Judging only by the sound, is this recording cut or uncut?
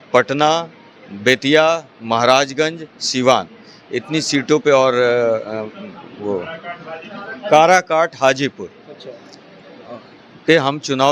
uncut